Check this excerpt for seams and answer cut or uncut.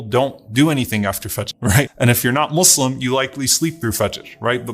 cut